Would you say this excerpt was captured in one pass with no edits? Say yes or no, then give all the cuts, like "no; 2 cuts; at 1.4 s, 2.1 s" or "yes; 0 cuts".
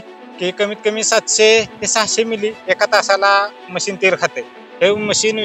yes; 0 cuts